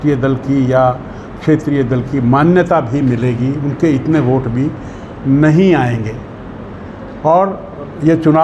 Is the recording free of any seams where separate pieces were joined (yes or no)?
yes